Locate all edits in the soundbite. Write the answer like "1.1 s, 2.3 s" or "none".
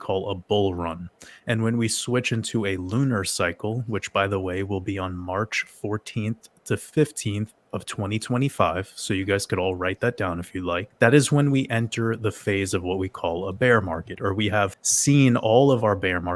10.9 s, 14.9 s